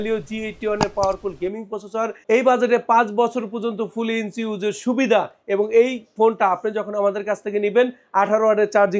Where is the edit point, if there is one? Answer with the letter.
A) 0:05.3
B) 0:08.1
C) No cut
C